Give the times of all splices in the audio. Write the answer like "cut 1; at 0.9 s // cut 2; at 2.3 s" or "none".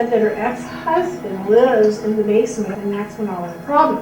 cut 1; at 2.7 s